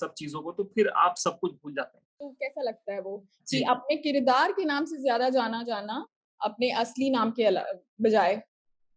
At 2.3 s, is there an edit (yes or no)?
yes